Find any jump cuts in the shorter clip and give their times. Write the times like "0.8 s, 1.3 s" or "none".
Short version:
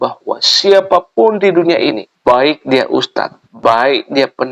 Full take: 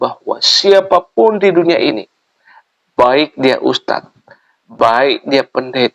2.1 s, 3.4 s